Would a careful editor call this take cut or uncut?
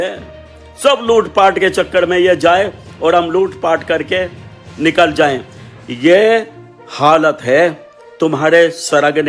uncut